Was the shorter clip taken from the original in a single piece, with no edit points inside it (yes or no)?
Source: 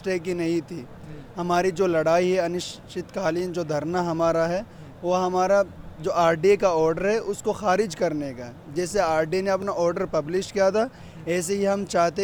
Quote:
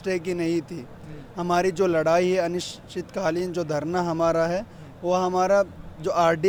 yes